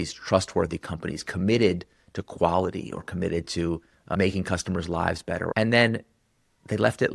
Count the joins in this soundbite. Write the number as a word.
one